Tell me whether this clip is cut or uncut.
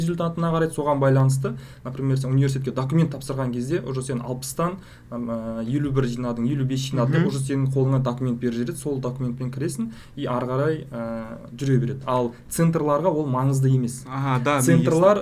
uncut